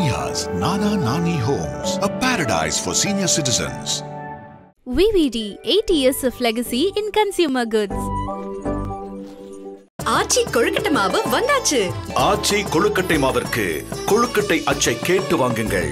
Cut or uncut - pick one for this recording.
uncut